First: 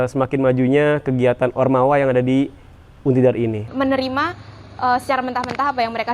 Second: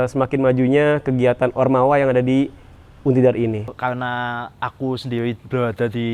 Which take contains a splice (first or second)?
first